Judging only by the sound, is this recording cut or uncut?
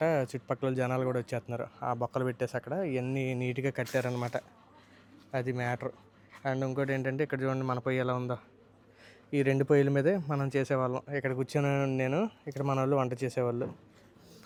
uncut